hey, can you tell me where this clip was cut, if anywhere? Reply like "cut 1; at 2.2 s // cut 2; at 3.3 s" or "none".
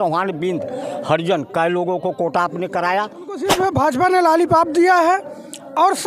cut 1; at 3.3 s